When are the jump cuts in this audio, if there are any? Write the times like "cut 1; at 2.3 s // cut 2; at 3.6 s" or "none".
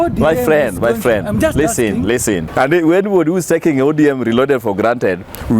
cut 1; at 2.5 s